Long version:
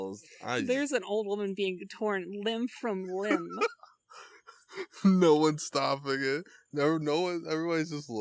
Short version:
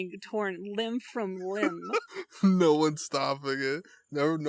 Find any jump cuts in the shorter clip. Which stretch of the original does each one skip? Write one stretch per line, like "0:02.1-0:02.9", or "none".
0:03.9-0:04.8

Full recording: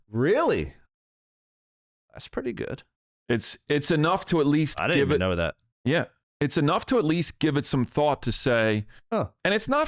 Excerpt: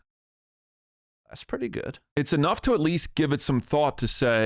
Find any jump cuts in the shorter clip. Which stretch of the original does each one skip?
0:02.8-0:06.2

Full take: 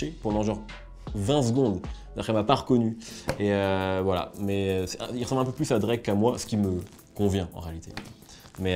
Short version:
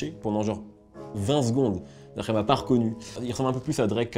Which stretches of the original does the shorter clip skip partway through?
0:03.1-0:05.0

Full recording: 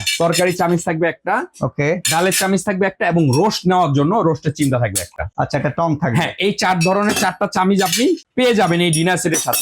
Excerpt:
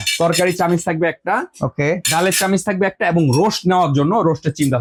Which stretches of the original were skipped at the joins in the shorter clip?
none

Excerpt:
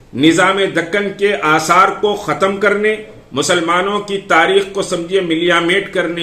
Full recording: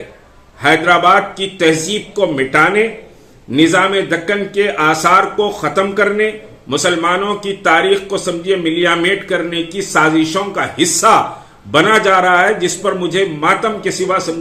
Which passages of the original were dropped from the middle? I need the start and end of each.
none

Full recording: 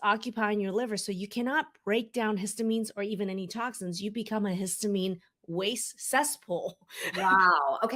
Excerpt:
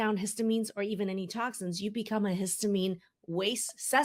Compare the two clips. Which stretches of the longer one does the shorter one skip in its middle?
none

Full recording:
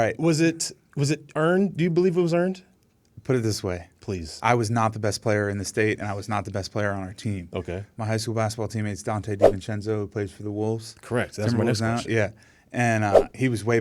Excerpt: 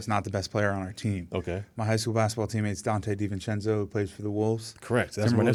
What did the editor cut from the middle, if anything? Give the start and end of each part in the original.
none

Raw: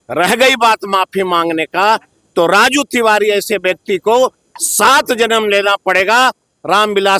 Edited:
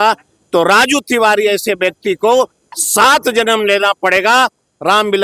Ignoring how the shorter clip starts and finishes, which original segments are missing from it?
none

